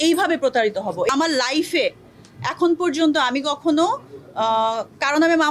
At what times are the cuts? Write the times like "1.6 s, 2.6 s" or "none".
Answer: 1.1 s